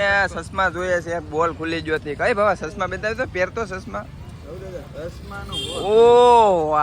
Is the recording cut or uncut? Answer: uncut